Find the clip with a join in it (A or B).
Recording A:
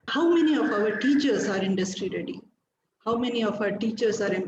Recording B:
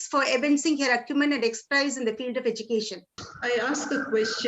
B